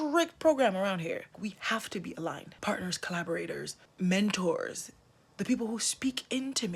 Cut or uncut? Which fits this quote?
cut